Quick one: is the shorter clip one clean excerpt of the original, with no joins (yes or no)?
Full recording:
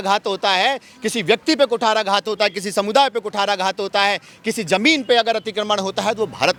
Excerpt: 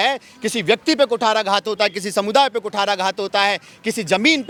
yes